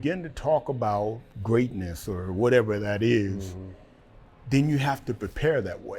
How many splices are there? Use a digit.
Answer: 1